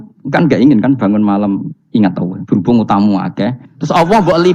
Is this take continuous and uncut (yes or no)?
yes